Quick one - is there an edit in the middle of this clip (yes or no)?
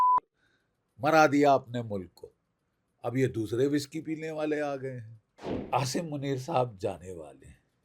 yes